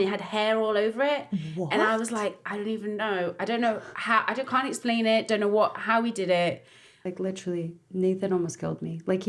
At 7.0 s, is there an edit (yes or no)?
yes